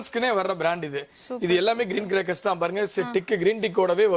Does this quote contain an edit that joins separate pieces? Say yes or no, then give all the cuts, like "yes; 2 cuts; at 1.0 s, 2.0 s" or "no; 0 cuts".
no; 0 cuts